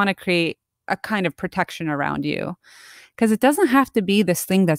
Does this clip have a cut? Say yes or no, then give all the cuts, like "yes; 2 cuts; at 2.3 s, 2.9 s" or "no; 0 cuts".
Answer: yes; 1 cut; at 3.0 s